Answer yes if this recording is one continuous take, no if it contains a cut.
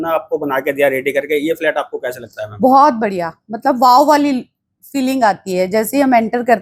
yes